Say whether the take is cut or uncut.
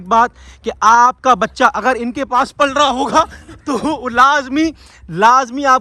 uncut